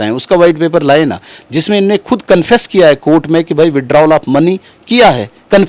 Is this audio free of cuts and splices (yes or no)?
yes